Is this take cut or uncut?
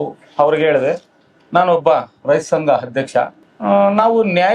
cut